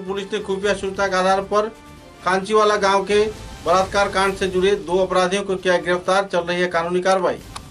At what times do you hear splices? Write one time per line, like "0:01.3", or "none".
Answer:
none